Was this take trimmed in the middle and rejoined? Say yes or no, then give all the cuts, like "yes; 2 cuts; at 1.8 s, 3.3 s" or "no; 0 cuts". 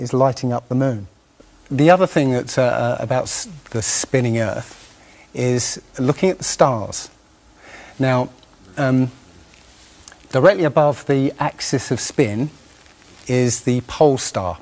yes; 1 cut; at 4.5 s